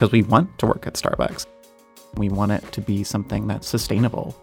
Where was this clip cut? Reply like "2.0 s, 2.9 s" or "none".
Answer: 1.8 s